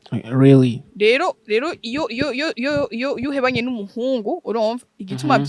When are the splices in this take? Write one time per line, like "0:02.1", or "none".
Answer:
none